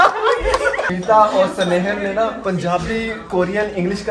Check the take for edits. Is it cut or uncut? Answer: cut